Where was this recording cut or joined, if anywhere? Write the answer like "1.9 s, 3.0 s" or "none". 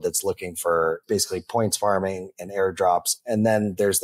1.0 s, 3.2 s